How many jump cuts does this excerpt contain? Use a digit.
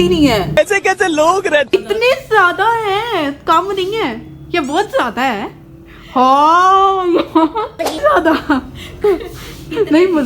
2